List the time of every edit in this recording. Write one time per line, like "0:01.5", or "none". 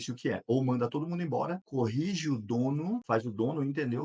0:01.6
0:03.0